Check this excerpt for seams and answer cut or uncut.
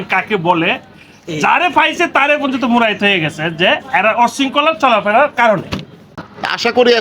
uncut